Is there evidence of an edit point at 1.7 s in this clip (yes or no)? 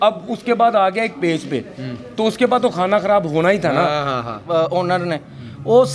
no